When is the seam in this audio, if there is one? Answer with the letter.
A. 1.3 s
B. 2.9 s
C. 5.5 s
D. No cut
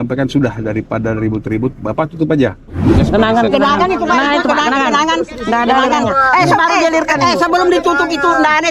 B